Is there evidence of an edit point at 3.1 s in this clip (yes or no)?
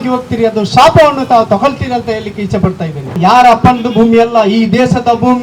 yes